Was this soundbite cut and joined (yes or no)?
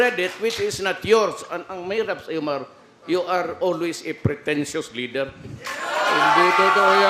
no